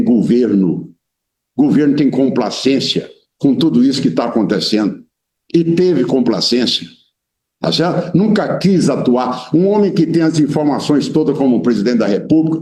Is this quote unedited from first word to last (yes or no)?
yes